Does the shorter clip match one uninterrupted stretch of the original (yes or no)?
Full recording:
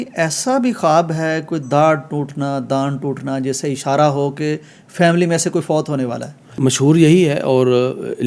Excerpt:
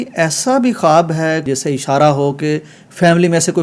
no